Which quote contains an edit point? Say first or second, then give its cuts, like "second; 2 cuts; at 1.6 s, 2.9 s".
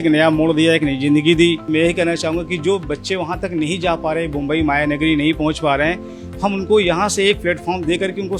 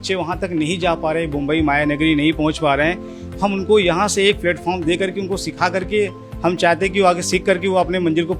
first; 1 cut; at 1.6 s